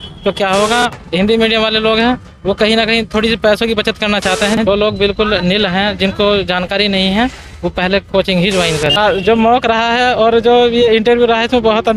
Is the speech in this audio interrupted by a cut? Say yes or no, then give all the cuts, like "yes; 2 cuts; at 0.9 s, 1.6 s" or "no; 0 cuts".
yes; 3 cuts; at 0.9 s, 4.6 s, 9.0 s